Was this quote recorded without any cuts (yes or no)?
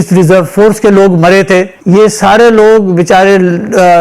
no